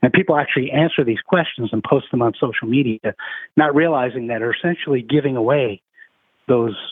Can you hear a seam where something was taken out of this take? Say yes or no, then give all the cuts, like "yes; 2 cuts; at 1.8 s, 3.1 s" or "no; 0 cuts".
no; 0 cuts